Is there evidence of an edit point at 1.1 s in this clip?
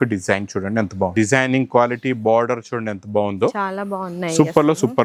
yes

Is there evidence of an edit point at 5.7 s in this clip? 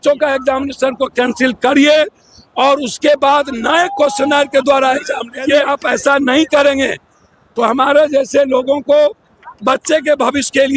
yes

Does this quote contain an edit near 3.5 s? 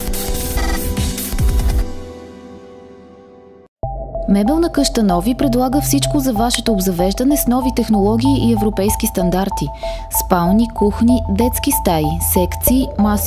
yes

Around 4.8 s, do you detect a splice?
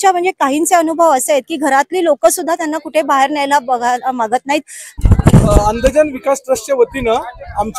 yes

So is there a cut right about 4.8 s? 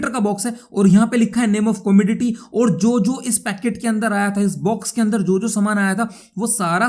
no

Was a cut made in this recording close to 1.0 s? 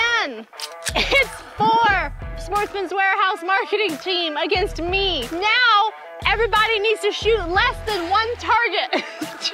yes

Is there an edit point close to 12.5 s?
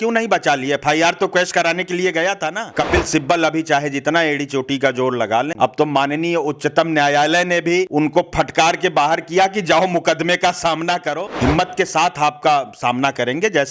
no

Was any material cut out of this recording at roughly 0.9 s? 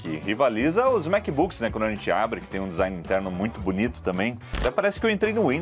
no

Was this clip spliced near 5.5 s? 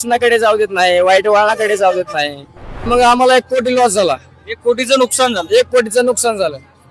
no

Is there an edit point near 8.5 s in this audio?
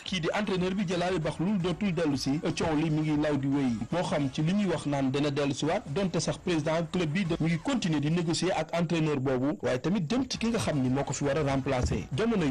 no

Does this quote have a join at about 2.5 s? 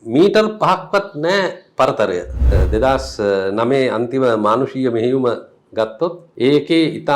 yes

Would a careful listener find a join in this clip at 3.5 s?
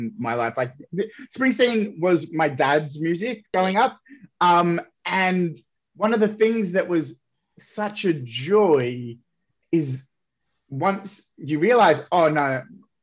yes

